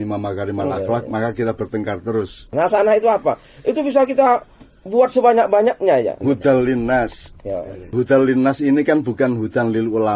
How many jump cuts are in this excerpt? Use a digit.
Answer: 3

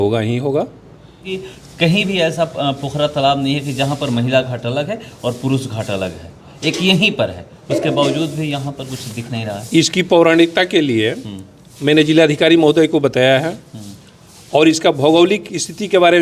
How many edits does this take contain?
1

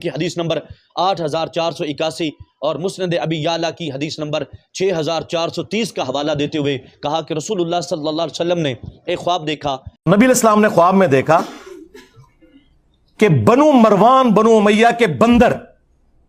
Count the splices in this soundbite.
1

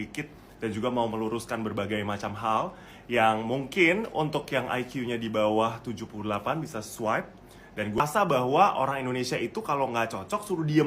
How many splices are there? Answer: 1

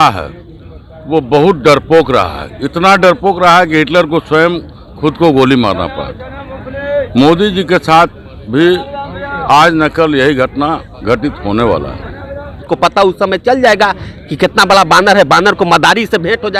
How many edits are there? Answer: 1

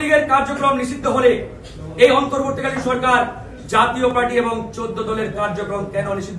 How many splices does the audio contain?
0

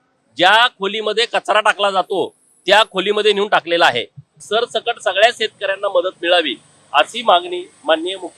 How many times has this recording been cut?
1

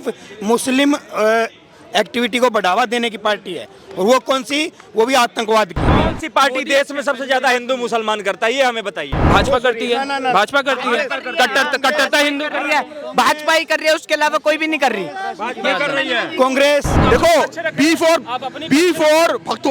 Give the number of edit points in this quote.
3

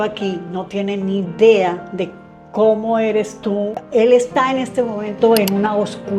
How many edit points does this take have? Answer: 1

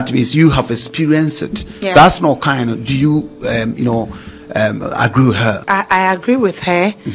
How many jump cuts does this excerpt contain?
1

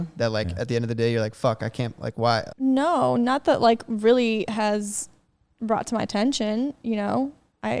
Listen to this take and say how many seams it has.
1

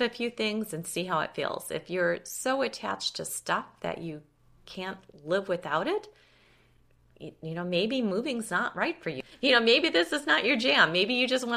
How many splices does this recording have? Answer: 1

